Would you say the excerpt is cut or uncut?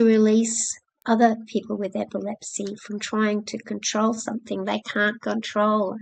cut